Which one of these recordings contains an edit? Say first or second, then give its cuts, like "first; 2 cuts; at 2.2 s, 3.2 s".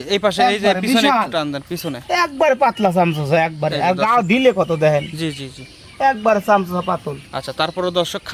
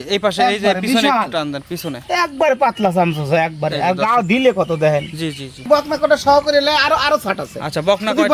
second; 1 cut; at 5.6 s